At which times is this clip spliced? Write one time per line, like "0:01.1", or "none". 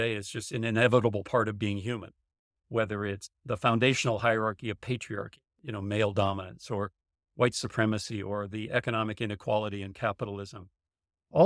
0:03.4